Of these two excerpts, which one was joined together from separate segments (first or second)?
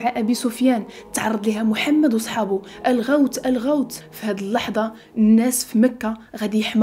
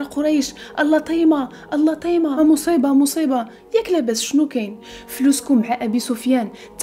second